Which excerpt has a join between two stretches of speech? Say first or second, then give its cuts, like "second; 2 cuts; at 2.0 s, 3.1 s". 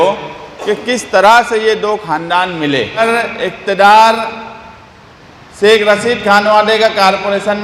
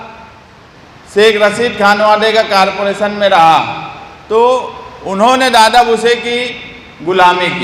first; 1 cut; at 3.0 s